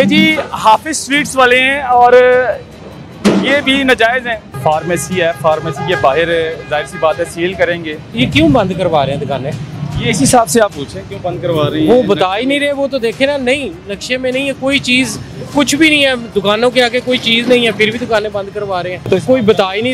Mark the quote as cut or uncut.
cut